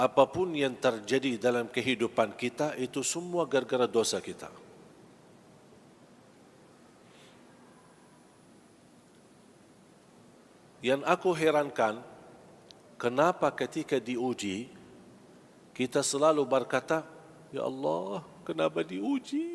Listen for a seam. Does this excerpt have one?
no; 0 cuts

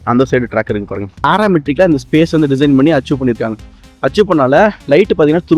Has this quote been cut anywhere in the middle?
yes; 1 cut; at 1.2 s

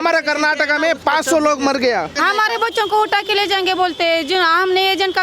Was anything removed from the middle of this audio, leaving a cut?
yes; 1 cut; at 2.1 s

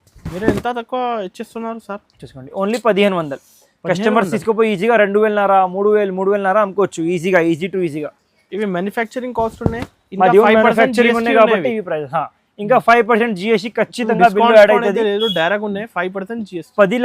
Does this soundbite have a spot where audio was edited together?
no; 0 cuts

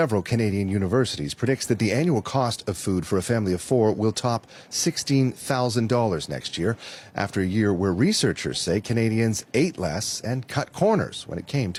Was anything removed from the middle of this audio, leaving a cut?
no; 0 cuts

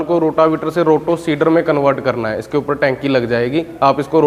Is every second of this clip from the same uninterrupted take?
yes; 0 cuts

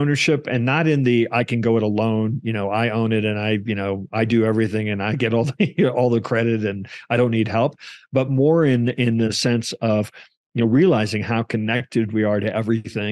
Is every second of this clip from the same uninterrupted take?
yes; 0 cuts

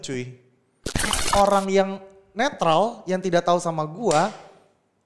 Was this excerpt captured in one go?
no; 1 cut; at 1.1 s

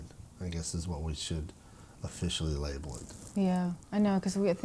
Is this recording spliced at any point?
no; 0 cuts

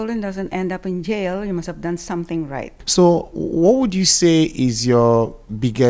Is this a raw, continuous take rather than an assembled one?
no; 1 cut; at 2.8 s

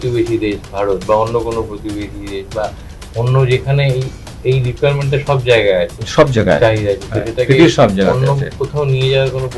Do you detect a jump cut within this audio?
no; 0 cuts

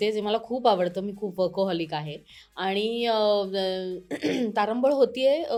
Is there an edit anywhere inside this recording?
no; 0 cuts

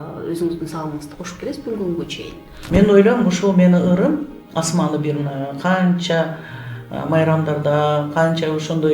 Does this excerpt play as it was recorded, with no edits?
no; 1 cut; at 2.6 s

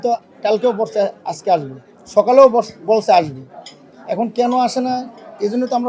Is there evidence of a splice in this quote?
no; 0 cuts

